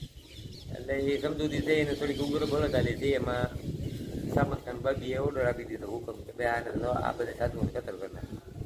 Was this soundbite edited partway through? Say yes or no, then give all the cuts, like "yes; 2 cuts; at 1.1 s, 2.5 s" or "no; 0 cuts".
no; 0 cuts